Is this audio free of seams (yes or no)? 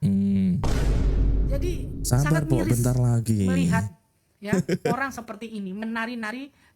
yes